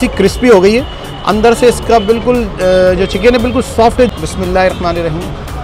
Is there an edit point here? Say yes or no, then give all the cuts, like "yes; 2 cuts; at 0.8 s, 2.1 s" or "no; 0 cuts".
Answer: yes; 1 cut; at 4.1 s